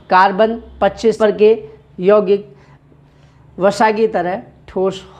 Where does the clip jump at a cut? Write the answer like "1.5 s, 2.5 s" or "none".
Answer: 1.2 s

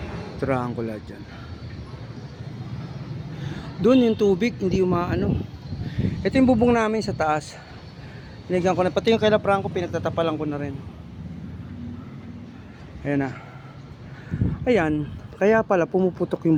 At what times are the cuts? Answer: none

